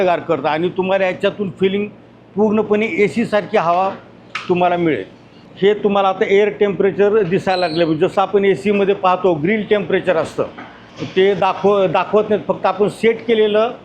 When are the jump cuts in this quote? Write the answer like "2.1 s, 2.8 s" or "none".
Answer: none